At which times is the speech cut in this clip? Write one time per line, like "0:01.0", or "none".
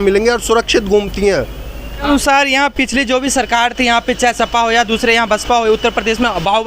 0:02.0